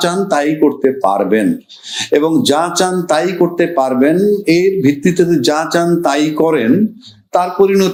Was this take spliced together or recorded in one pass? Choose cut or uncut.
uncut